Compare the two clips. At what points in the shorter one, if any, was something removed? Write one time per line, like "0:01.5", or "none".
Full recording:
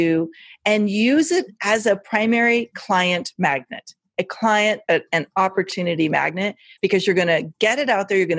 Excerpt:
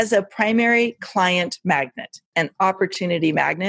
0:02.3